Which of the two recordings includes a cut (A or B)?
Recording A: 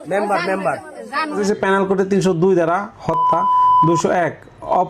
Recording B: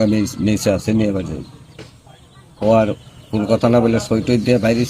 A